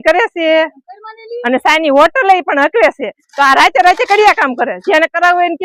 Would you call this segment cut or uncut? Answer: uncut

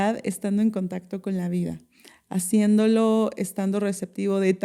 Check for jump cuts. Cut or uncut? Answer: uncut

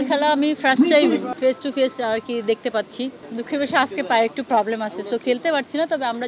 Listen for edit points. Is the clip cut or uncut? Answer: cut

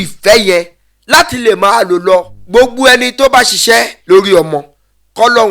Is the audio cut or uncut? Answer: cut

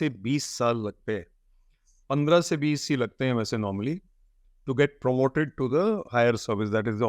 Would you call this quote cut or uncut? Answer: uncut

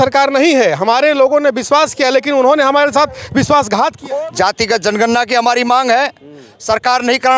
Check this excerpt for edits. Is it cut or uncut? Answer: cut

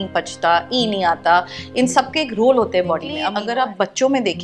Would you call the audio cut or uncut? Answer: cut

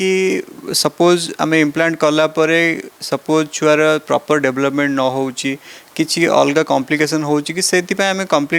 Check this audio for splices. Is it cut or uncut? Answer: uncut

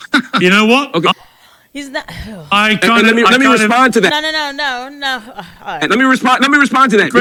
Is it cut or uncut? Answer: uncut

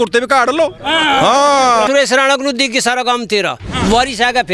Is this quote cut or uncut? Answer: cut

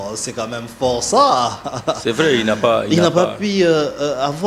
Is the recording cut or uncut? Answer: uncut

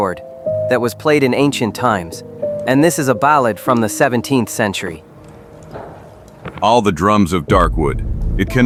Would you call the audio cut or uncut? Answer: uncut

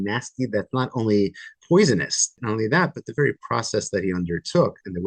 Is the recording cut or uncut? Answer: cut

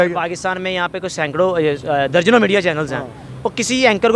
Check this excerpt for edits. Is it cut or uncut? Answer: uncut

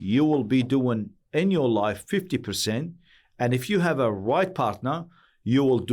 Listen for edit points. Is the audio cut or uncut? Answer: uncut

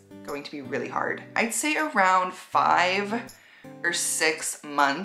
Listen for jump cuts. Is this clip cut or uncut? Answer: cut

